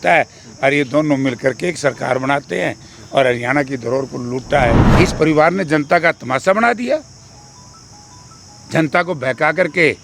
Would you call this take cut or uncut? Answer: cut